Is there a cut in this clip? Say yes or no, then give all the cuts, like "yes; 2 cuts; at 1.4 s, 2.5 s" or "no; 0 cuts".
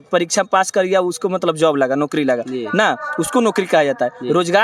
no; 0 cuts